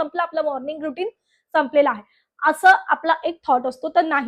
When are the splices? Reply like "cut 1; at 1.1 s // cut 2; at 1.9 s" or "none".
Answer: none